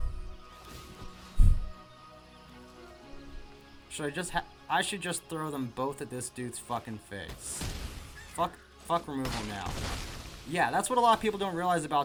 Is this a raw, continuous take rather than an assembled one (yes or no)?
yes